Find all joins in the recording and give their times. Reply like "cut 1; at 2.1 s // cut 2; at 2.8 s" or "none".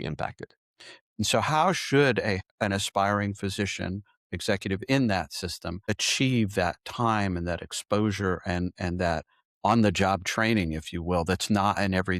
cut 1; at 1.1 s // cut 2; at 2.4 s // cut 3; at 5.9 s